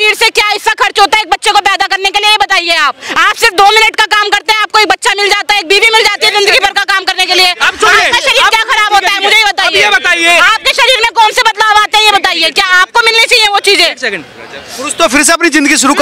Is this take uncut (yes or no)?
yes